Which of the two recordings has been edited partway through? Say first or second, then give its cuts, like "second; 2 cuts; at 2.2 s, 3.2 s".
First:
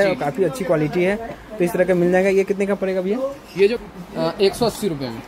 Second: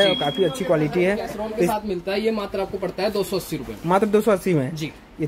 second; 1 cut; at 1.7 s